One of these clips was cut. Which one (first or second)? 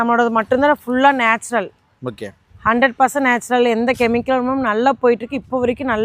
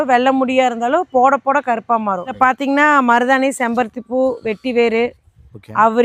second